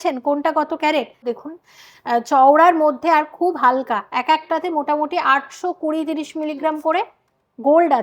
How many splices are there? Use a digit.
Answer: 1